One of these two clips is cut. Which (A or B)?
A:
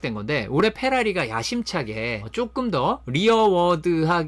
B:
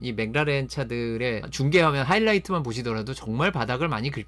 A